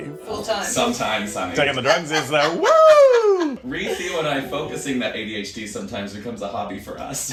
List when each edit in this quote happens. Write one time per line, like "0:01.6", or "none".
none